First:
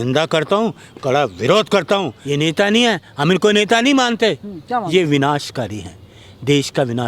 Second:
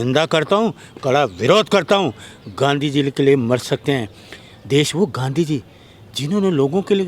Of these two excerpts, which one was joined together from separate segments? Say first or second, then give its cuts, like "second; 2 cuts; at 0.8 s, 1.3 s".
first; 1 cut; at 2.2 s